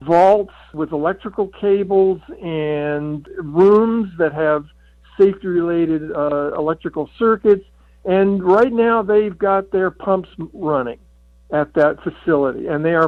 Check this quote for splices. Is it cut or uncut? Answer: uncut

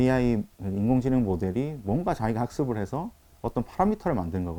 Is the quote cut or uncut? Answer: uncut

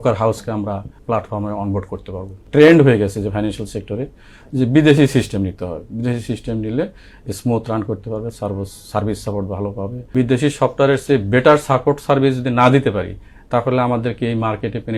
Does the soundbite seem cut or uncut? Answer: cut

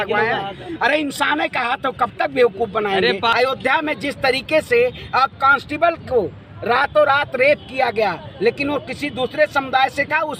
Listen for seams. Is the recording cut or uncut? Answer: cut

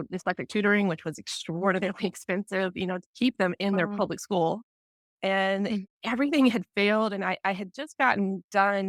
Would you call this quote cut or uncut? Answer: uncut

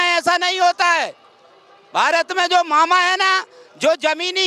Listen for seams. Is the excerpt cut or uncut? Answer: uncut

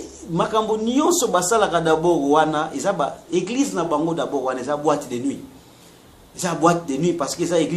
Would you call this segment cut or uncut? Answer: uncut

